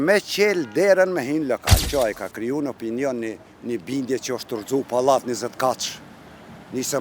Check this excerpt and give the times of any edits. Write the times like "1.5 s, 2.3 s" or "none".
1.8 s